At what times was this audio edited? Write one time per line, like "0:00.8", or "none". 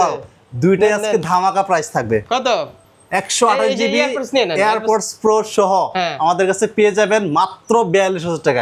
none